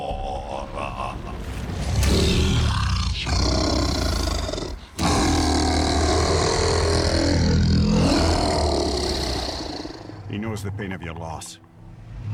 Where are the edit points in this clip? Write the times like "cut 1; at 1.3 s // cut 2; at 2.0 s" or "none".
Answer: none